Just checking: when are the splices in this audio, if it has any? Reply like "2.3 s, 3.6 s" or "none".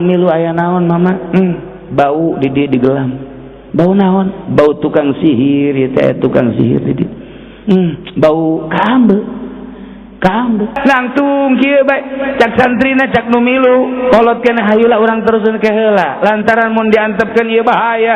10.8 s